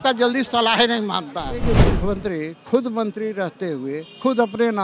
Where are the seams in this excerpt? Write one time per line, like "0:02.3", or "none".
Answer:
0:01.6